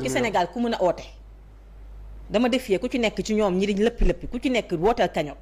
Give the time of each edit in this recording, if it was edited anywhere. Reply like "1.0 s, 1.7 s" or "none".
none